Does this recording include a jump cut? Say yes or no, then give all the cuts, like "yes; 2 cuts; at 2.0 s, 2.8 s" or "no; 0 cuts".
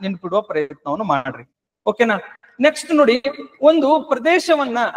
no; 0 cuts